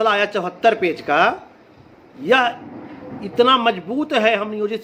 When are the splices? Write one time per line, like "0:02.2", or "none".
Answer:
none

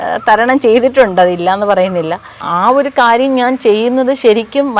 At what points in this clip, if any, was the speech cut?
0:02.4

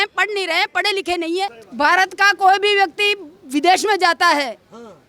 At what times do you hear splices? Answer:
0:01.6

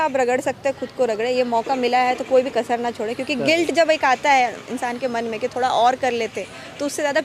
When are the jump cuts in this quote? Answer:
none

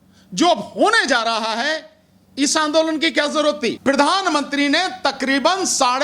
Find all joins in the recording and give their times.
0:03.8

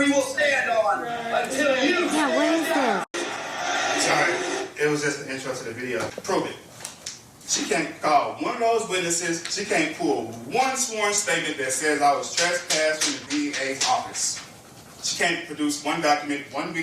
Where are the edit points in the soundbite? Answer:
0:03.1
0:06.1
0:13.2

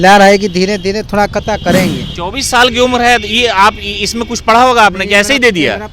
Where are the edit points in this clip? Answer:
0:02.1

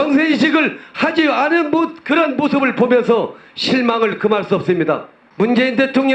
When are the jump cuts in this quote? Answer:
0:05.2

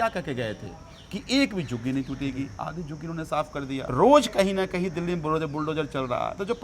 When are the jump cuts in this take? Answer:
0:03.9

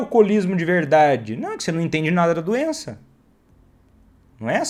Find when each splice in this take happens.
none

